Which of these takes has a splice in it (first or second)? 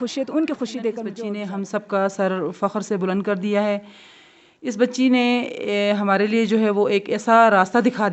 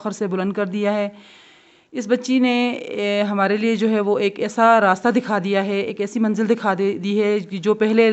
first